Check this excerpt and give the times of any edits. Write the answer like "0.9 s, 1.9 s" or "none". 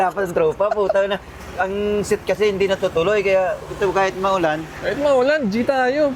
none